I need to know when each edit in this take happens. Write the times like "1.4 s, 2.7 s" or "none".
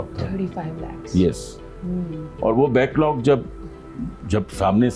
none